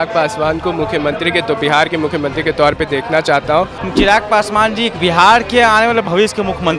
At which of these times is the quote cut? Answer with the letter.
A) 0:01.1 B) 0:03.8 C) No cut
B